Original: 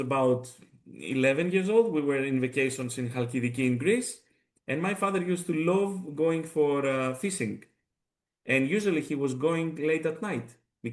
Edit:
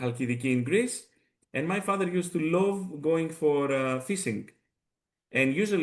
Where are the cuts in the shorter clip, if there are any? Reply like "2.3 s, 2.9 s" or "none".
none